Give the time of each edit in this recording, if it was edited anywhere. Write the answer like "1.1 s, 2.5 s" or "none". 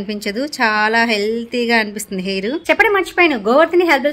2.6 s